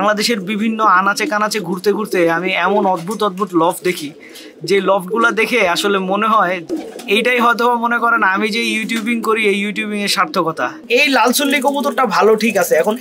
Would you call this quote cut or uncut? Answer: cut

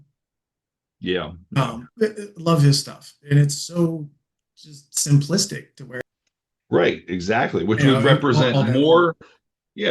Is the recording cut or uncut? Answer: cut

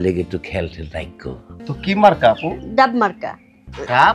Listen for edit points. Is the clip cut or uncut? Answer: cut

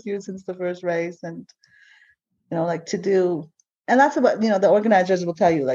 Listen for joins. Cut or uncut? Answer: uncut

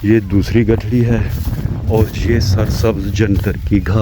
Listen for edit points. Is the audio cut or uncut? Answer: uncut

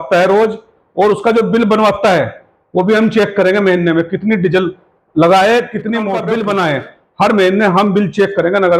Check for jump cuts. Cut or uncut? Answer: cut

